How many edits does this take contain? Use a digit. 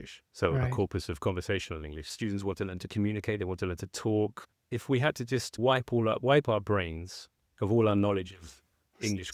2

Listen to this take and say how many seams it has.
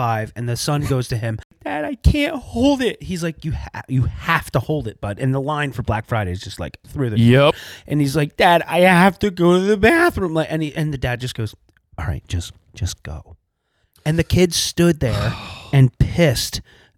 2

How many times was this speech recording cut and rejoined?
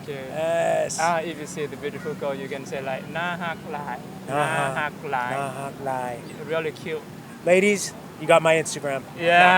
0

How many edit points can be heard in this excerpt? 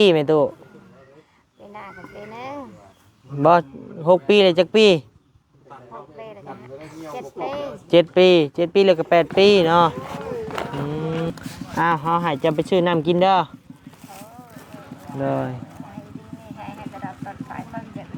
1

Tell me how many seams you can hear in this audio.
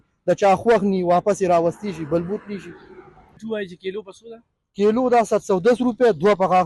1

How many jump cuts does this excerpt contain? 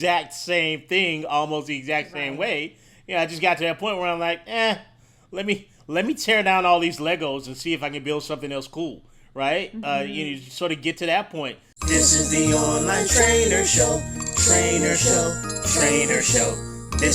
1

